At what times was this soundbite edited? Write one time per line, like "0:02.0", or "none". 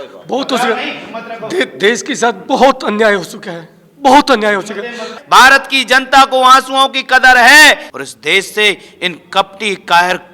0:05.1
0:07.9